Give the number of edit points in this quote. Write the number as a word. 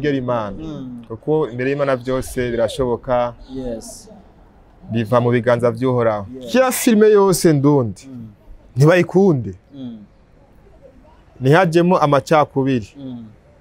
one